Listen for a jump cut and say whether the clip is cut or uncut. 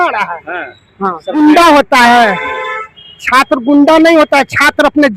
cut